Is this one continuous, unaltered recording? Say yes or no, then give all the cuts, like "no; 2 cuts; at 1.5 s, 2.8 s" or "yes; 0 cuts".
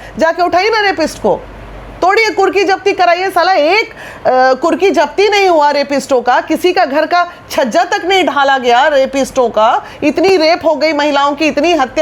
yes; 0 cuts